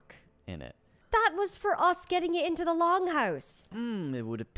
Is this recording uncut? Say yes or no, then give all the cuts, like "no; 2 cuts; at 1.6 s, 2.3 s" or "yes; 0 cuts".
no; 2 cuts; at 0.9 s, 3.7 s